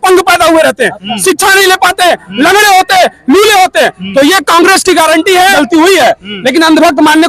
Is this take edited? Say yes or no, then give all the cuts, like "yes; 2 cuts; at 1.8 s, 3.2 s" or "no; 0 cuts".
yes; 1 cut; at 5.5 s